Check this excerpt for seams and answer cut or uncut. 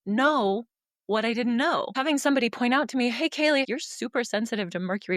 cut